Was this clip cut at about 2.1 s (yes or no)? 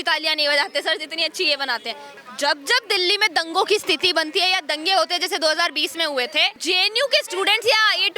yes